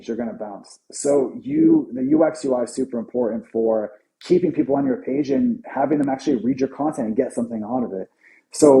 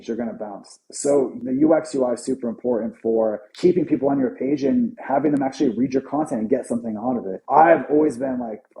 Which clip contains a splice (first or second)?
second